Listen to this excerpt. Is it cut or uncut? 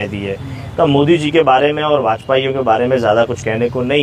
uncut